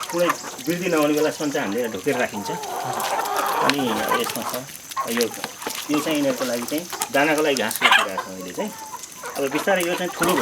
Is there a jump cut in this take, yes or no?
no